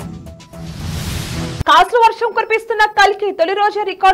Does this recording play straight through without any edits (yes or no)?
no